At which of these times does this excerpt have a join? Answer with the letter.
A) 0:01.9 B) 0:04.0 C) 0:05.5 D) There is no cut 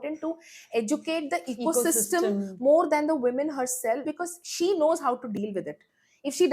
B